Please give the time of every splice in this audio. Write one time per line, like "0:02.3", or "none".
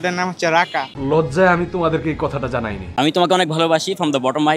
0:03.0